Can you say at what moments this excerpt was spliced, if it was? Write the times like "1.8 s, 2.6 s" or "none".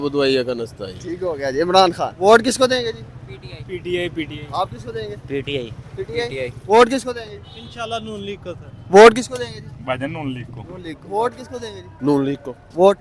2.1 s, 6.6 s, 11.4 s